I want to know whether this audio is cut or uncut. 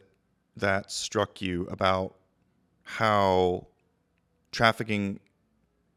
uncut